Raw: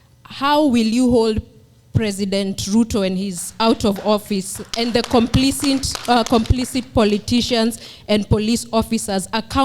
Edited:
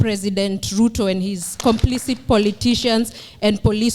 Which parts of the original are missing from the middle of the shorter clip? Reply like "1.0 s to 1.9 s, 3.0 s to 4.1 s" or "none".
3.5 s to 6.3 s